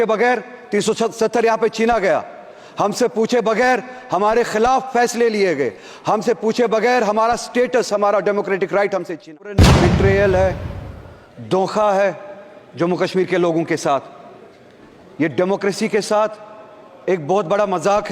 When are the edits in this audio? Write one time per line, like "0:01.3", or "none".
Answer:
0:09.6

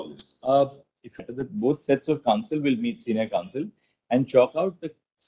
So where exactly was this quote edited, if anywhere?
0:01.1

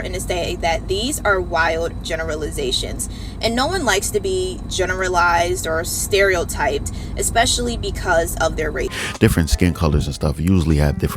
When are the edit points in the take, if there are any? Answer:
0:09.0

